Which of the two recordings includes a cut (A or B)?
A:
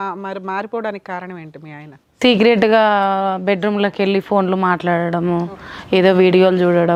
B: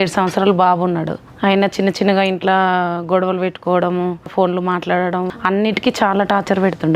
B